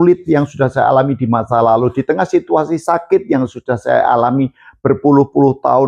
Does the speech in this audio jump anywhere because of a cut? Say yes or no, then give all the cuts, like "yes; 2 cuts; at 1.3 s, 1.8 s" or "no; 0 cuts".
no; 0 cuts